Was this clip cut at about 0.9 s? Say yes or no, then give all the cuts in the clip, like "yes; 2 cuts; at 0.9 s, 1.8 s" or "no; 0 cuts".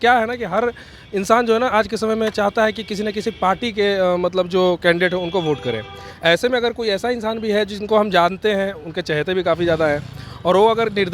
no; 0 cuts